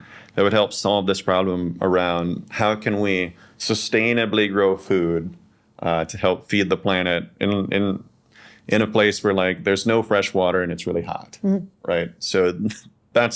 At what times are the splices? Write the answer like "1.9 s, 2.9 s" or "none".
none